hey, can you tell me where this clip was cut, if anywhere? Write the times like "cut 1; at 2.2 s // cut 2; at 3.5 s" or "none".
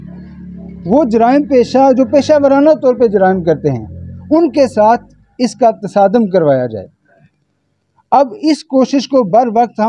none